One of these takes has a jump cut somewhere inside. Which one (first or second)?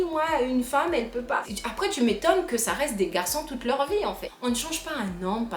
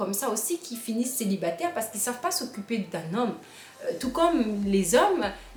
first